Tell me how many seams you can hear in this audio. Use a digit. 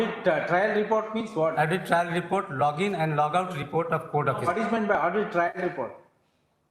0